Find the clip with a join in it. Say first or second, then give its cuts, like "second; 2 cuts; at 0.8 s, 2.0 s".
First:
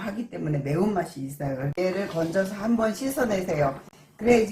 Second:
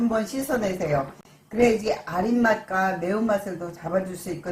first; 1 cut; at 1.7 s